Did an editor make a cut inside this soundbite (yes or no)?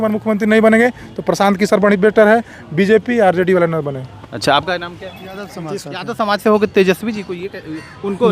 yes